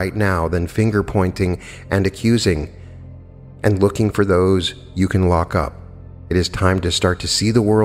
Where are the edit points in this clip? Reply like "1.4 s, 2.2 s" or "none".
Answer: none